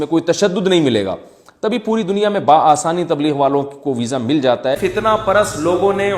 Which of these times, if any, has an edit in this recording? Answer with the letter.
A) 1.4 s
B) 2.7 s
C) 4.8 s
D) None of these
C